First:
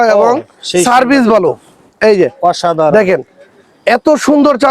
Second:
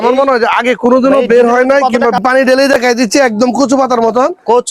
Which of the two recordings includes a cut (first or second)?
second